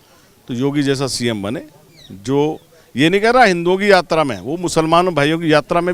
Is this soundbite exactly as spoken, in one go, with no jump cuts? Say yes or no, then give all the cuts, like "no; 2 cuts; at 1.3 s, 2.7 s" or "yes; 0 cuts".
yes; 0 cuts